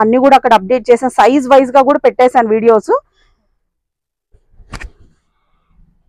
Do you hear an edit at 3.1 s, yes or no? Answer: no